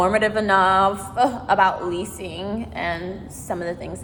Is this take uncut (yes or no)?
yes